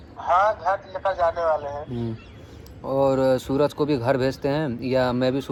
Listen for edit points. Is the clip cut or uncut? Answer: uncut